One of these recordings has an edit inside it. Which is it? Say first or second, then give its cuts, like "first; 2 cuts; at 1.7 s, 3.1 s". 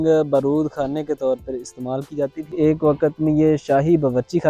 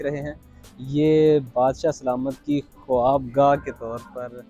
first; 1 cut; at 2.4 s